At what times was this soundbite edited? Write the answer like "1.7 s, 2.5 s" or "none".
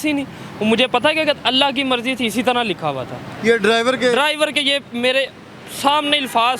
none

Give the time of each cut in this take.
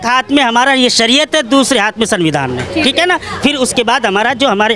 none

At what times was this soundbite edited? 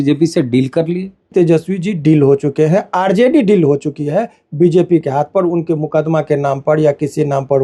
1.3 s

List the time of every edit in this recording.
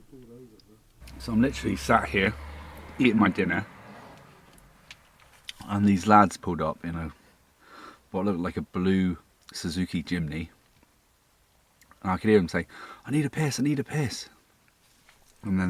0.9 s

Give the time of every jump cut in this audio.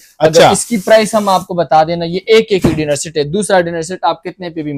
none

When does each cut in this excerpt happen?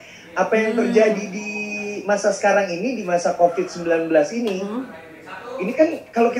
none

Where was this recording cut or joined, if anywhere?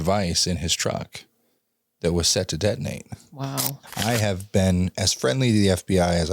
3.8 s

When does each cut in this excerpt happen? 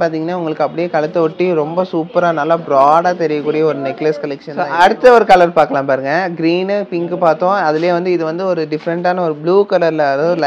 4.6 s

